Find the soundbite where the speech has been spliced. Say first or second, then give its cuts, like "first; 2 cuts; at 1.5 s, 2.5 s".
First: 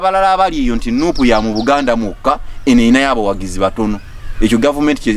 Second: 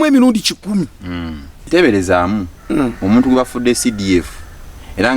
second; 1 cut; at 1.7 s